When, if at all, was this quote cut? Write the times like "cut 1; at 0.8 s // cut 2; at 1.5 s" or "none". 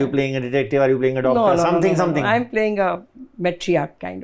cut 1; at 3.2 s